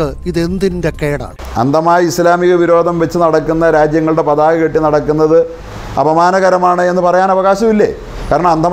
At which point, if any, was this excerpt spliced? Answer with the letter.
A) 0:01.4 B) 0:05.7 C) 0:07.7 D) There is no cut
A